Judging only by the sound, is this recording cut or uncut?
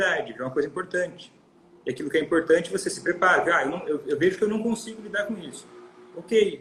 uncut